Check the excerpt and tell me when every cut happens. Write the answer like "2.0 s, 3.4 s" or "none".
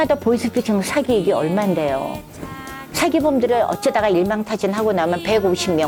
none